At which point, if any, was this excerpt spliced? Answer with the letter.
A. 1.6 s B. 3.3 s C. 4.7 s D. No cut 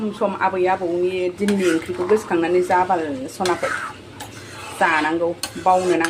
D